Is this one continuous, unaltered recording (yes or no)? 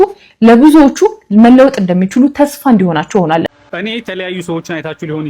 no